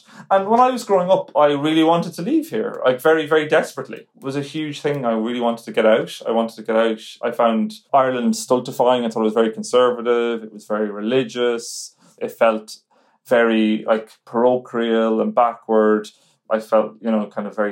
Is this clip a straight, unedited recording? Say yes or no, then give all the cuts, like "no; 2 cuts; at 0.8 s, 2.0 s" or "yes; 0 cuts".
no; 1 cut; at 12.2 s